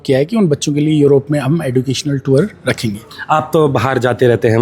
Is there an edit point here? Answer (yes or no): no